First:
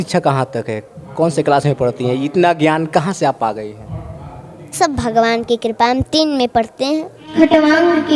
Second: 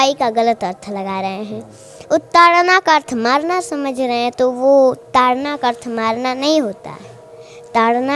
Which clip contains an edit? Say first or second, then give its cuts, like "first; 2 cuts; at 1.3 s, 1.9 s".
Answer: first; 1 cut; at 7.2 s